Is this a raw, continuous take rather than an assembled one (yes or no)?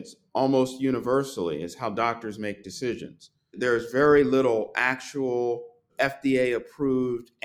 no